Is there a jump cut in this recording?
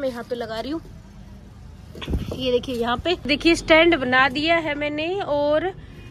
yes; 1 cut; at 3.3 s

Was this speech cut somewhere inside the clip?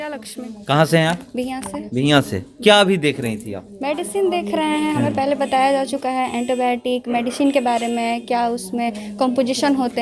no; 0 cuts

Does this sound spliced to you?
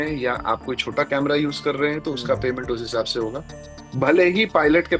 no; 0 cuts

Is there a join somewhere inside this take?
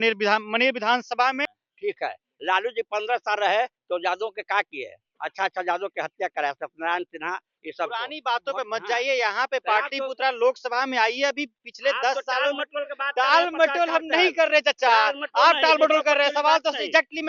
no; 0 cuts

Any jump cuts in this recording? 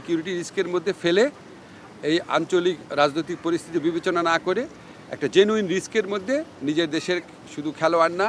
no; 0 cuts

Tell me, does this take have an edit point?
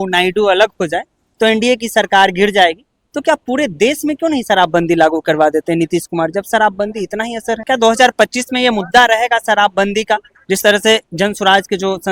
yes; 1 cut; at 7.6 s

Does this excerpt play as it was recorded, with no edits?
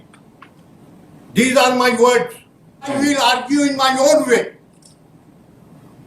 no; 1 cut; at 2.9 s

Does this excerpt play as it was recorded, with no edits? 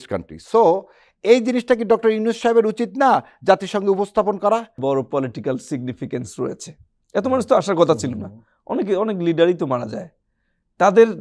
no; 1 cut; at 4.8 s

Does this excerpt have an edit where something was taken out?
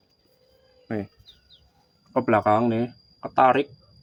no; 0 cuts

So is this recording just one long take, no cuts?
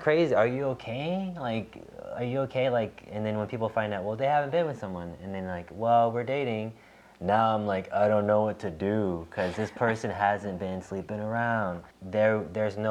no; 1 cut; at 11.9 s

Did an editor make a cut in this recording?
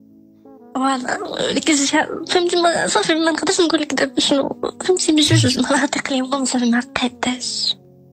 no; 0 cuts

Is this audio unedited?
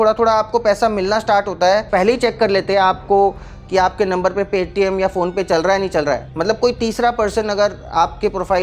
no; 2 cuts; at 1.9 s, 6.3 s

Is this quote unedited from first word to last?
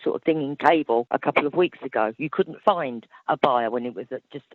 no; 2 cuts; at 1.1 s, 2.5 s

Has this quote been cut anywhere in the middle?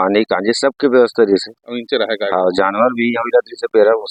no; 0 cuts

